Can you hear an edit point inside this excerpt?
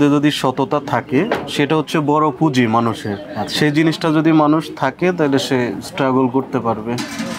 no; 0 cuts

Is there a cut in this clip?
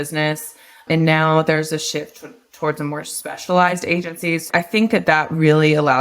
yes; 1 cut; at 4.4 s

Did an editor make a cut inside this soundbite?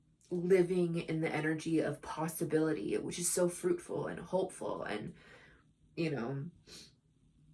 no; 0 cuts

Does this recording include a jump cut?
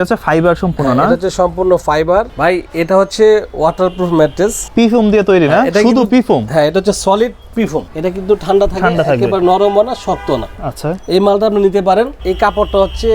yes; 4 cuts; at 2.3 s, 4.6 s, 7.9 s, 12.2 s

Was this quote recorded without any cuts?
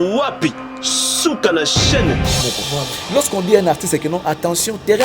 no; 1 cut; at 2.4 s

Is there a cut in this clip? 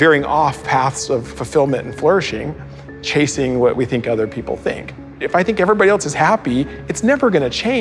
yes; 2 cuts; at 1.4 s, 5.1 s

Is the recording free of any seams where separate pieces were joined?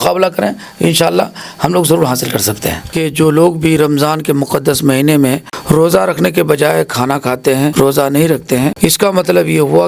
no; 4 cuts; at 3.0 s, 5.5 s, 7.7 s, 8.7 s

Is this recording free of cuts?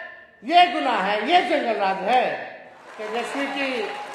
no; 1 cut; at 2.9 s

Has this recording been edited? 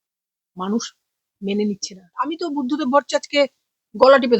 yes; 1 cut; at 2.2 s

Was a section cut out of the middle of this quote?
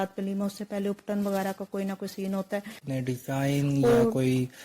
yes; 1 cut; at 2.8 s

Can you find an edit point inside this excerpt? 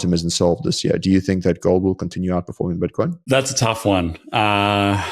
yes; 1 cut; at 3.2 s

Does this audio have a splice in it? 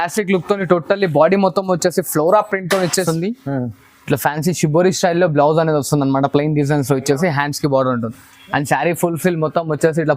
yes; 1 cut; at 3.0 s

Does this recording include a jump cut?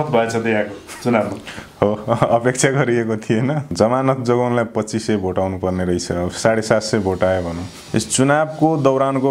yes; 2 cuts; at 3.6 s, 7.8 s

